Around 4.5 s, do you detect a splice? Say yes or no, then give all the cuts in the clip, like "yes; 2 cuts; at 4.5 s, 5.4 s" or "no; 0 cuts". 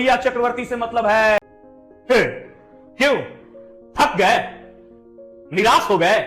no; 1 cut; at 1.4 s